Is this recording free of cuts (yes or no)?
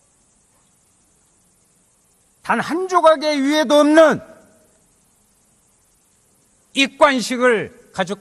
no